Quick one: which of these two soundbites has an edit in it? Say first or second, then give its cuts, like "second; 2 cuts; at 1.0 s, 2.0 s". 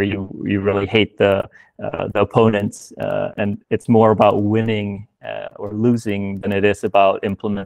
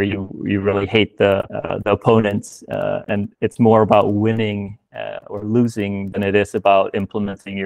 second; 1 cut; at 1.6 s